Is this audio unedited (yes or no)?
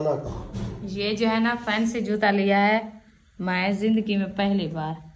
yes